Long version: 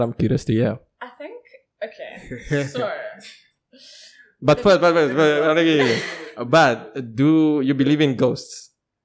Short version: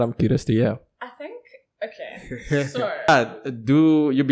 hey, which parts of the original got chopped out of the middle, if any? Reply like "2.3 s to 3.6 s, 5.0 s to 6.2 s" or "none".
3.1 s to 6.6 s